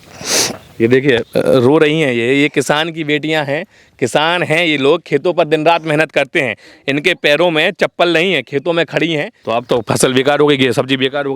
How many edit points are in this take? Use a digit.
1